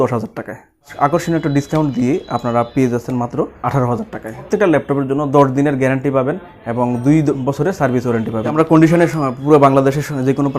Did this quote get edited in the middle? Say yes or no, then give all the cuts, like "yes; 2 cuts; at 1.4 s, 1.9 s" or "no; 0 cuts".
yes; 4 cuts; at 0.9 s, 3.5 s, 4.5 s, 8.6 s